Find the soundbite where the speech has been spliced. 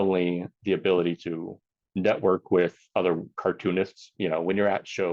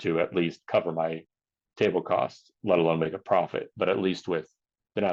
first; 1 cut; at 4.0 s

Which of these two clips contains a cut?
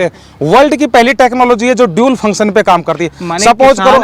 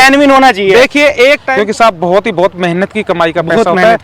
second; 1 cut; at 1.4 s

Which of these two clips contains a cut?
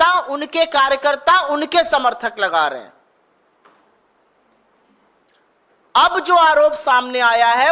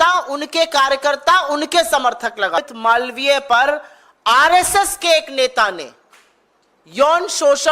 second; 1 cut; at 2.6 s

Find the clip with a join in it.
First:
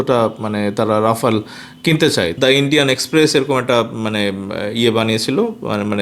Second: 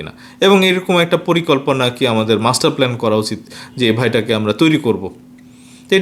first; 1 cut; at 2.3 s

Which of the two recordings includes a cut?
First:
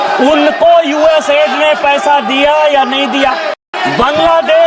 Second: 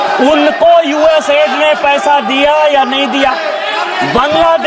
first; 1 cut; at 3.6 s

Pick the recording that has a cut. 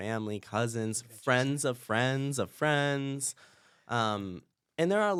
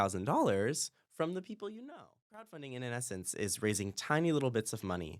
second; 1 cut; at 2.5 s

